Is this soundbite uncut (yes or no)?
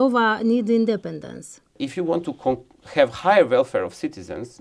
no